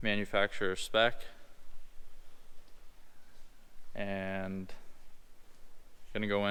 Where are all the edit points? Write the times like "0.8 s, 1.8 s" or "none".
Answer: none